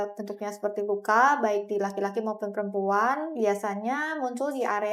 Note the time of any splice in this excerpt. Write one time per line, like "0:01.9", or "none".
none

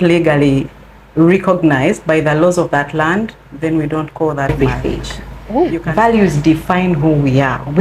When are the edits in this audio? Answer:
0:05.8

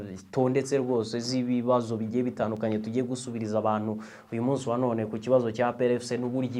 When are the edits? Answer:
none

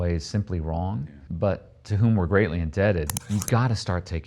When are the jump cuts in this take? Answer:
0:01.1
0:03.2

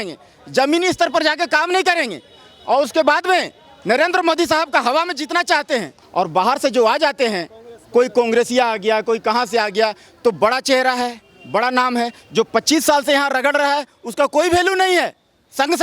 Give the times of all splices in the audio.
0:06.0

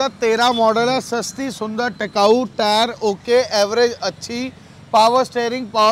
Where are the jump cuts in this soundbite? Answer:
none

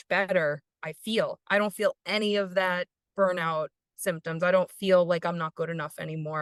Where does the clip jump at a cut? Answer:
none

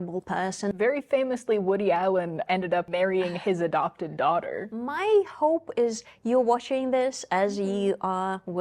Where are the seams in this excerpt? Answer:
0:00.7
0:02.6
0:04.6

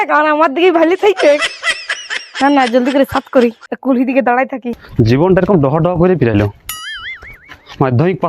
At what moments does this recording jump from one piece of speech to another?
0:04.8

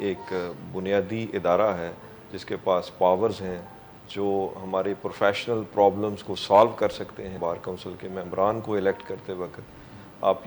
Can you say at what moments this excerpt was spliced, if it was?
0:07.3

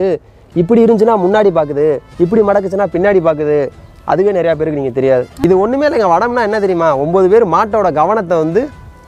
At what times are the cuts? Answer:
0:05.3

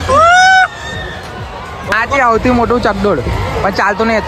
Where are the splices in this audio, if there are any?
0:01.8

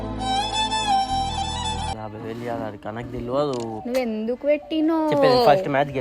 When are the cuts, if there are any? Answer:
0:02.1

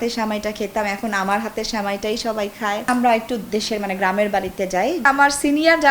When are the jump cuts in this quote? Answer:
0:02.8
0:05.0

